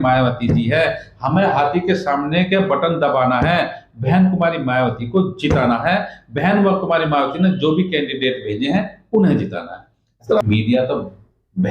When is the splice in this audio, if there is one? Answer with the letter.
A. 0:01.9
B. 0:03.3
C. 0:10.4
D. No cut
C